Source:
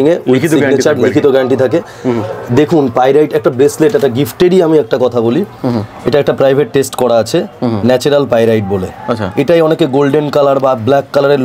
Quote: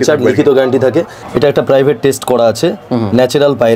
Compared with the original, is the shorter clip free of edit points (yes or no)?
no